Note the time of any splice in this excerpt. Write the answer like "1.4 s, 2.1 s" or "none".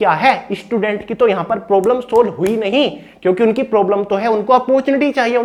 none